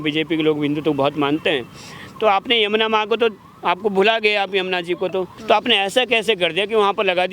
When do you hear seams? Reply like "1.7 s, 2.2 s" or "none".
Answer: 5.3 s